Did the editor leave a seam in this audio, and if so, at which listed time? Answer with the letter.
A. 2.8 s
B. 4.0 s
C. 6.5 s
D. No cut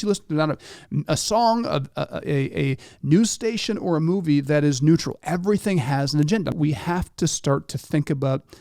C